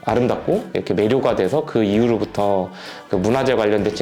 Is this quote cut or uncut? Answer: uncut